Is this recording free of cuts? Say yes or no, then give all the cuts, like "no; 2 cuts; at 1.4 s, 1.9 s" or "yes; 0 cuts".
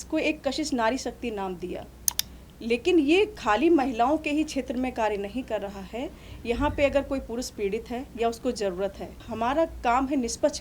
no; 1 cut; at 9.3 s